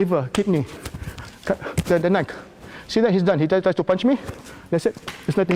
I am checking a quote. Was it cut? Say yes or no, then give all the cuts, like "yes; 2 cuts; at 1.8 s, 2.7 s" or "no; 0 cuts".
no; 0 cuts